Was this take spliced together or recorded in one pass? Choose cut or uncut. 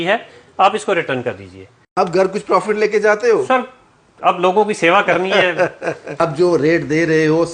cut